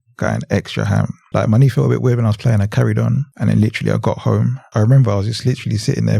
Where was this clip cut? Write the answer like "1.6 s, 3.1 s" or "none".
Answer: 1.2 s, 3.3 s, 4.6 s